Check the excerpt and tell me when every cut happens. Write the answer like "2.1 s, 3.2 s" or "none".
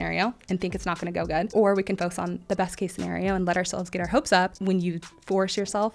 1.5 s, 4.6 s